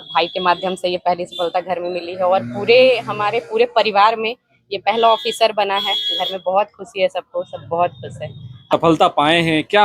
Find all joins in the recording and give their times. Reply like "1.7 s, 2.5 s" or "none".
8.8 s